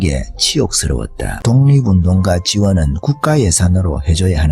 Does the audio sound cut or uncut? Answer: cut